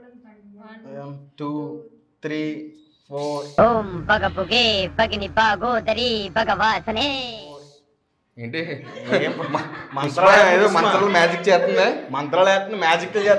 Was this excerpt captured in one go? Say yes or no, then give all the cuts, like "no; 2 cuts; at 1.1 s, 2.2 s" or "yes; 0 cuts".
yes; 0 cuts